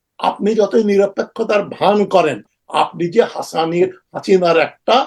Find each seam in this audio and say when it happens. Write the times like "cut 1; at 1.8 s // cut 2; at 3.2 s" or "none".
none